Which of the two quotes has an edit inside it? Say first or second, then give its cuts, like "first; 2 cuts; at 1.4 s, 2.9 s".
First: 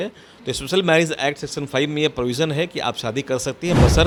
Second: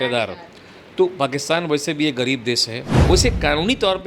second; 1 cut; at 2.8 s